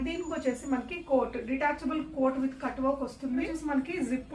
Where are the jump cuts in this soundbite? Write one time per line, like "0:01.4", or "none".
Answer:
0:03.4